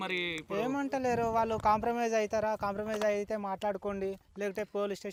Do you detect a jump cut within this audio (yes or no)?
no